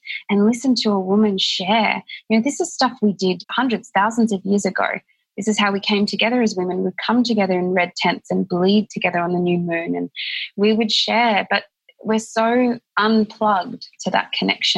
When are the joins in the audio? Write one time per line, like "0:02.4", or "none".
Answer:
0:03.5
0:12.9
0:13.9